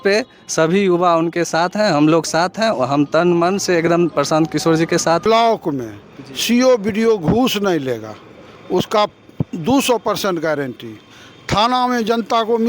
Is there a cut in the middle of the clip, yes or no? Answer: yes